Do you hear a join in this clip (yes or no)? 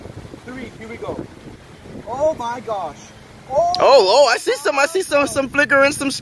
no